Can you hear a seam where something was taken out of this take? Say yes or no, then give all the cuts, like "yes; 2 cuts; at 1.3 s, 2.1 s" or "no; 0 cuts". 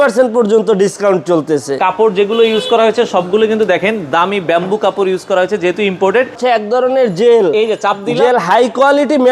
yes; 2 cuts; at 1.7 s, 6.4 s